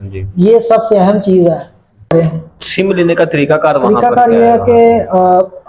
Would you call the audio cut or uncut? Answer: cut